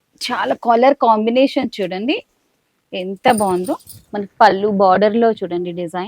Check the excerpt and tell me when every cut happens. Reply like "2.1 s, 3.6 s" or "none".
none